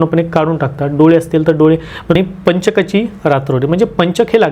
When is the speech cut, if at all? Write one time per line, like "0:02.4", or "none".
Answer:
0:02.2